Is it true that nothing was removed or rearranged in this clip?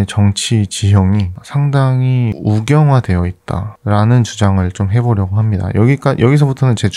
yes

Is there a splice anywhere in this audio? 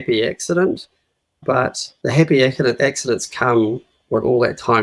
yes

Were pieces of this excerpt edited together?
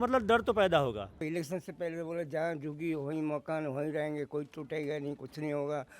yes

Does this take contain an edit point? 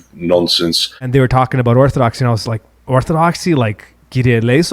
yes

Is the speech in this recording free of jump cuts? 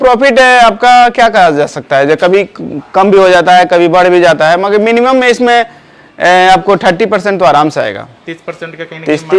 yes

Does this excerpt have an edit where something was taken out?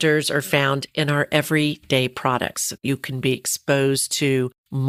no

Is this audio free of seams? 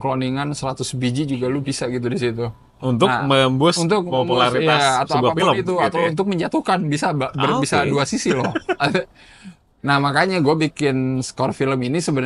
yes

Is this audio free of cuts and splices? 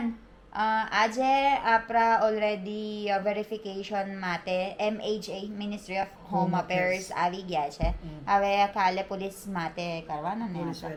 yes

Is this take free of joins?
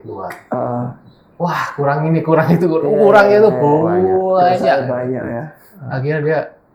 yes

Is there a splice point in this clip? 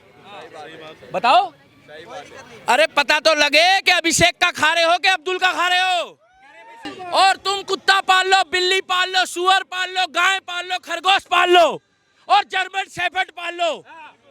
yes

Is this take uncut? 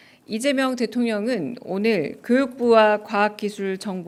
yes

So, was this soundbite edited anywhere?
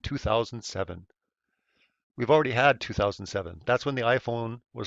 yes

